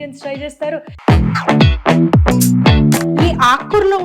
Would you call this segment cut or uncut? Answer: cut